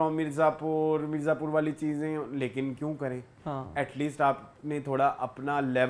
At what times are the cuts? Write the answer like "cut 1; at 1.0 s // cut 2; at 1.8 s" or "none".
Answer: none